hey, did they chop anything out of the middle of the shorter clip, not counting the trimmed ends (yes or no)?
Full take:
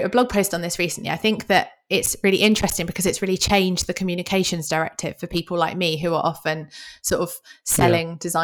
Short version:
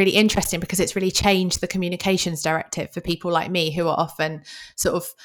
no